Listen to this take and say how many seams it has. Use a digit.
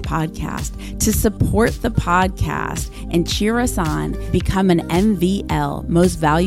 0